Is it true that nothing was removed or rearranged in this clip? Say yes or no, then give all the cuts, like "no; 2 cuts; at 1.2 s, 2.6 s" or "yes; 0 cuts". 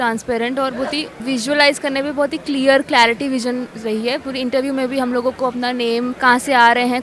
no; 2 cuts; at 1.1 s, 6.1 s